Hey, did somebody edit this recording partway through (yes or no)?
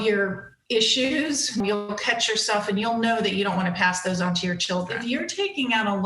yes